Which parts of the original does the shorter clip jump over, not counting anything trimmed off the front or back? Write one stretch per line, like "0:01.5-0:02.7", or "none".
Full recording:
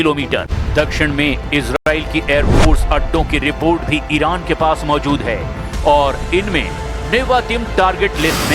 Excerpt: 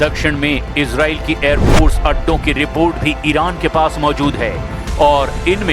0:01.7-0:01.8